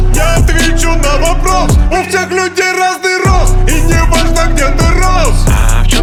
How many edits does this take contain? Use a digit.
0